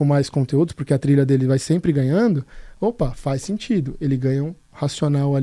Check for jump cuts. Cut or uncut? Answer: uncut